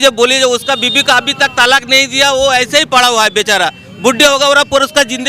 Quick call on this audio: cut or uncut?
uncut